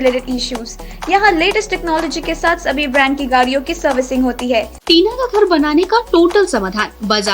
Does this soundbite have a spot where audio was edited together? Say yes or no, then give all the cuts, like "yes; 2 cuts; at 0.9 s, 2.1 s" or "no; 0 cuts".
yes; 1 cut; at 4.8 s